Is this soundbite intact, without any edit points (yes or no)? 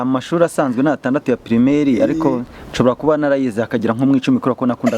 yes